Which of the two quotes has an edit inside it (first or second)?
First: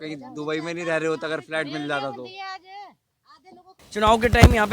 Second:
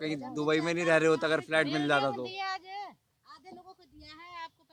first